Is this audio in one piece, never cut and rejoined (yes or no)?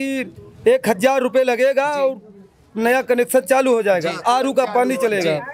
yes